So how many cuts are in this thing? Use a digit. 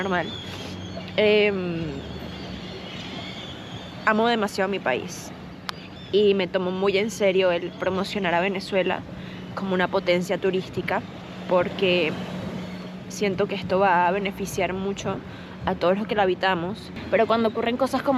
1